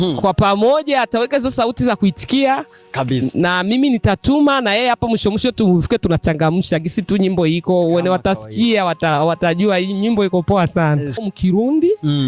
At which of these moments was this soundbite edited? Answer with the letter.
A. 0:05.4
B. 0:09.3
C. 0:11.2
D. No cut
C